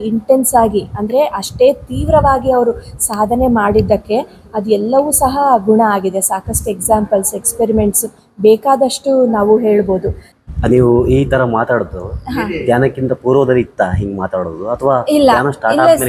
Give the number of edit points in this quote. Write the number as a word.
one